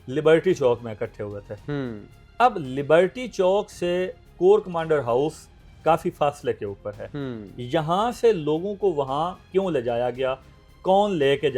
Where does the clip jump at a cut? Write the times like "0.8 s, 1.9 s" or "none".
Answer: none